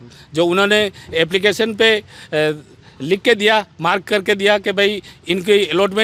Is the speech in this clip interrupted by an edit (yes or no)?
no